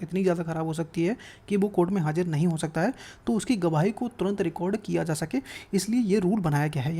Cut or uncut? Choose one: uncut